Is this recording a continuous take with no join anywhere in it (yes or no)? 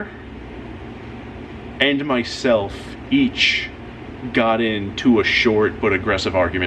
yes